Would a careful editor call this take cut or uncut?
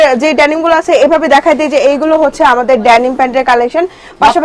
uncut